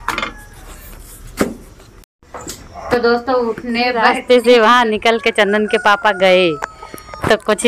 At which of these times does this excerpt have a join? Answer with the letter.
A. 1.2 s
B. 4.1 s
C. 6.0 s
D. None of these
B